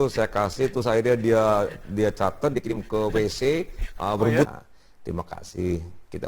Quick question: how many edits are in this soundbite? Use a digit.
1